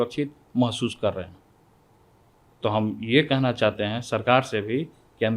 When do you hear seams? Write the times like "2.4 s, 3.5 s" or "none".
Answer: none